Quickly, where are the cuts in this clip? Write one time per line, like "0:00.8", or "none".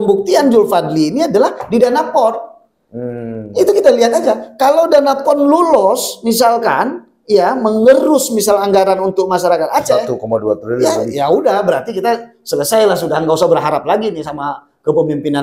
none